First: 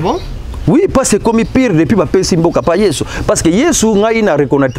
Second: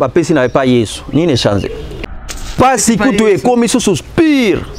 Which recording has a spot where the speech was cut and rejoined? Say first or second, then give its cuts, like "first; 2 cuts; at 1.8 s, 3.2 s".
second; 1 cut; at 2.0 s